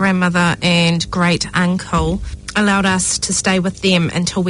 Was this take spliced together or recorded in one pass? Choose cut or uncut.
cut